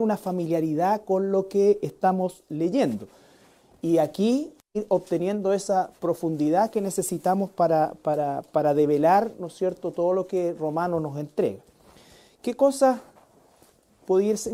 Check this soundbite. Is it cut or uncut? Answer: uncut